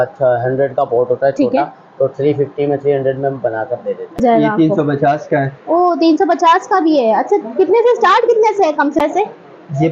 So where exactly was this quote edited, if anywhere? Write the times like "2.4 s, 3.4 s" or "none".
4.2 s, 9.0 s

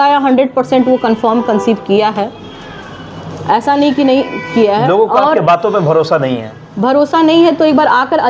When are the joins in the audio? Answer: none

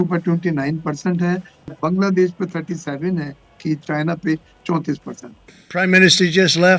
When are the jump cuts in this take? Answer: none

